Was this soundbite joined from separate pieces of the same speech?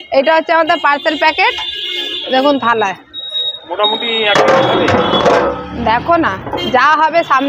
no; 0 cuts

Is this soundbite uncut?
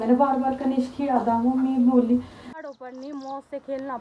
no; 1 cut; at 2.5 s

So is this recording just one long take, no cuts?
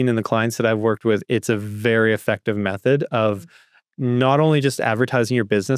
yes; 0 cuts

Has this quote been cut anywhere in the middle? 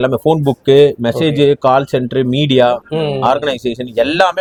no; 0 cuts

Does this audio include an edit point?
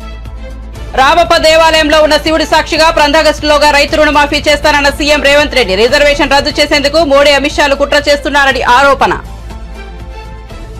no; 0 cuts

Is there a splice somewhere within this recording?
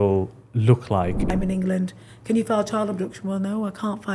yes; 1 cut; at 1.2 s

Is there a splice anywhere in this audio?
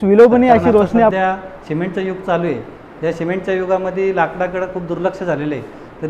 yes; 1 cut; at 1.1 s

